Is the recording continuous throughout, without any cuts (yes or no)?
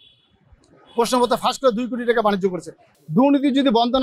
no